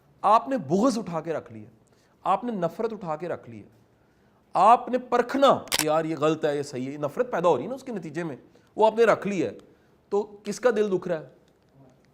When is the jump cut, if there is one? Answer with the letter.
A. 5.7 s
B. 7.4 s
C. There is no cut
A